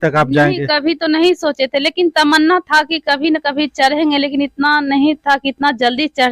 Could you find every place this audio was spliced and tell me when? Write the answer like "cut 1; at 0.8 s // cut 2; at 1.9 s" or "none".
none